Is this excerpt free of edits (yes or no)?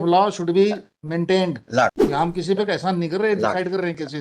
no